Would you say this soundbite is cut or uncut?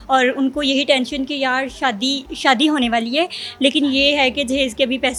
uncut